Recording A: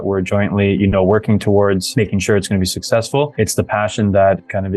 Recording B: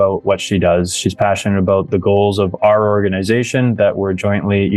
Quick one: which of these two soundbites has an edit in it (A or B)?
A